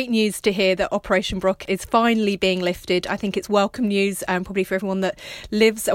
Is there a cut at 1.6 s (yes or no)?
yes